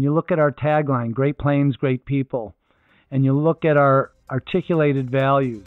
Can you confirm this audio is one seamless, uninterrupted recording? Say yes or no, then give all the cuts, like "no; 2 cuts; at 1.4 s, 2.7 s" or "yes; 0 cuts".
no; 1 cut; at 4.1 s